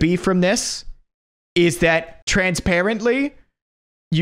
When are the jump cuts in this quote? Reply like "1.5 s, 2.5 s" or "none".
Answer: 2.2 s